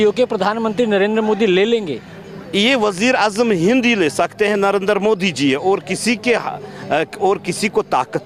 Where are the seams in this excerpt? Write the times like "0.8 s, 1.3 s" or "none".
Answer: none